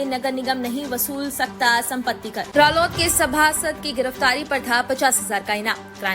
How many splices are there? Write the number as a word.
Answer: one